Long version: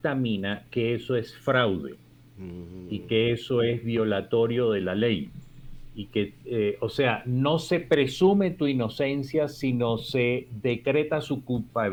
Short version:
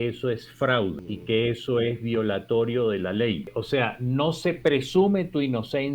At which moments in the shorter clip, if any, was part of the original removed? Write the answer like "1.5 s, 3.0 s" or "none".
1.1 s, 3.6 s